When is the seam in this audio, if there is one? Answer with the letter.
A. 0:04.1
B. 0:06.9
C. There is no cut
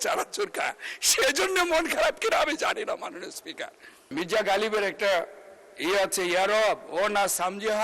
A